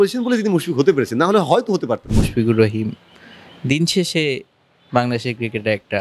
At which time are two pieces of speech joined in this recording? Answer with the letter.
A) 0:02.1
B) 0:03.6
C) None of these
A